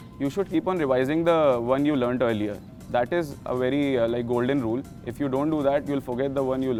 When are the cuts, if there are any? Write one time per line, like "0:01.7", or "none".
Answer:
none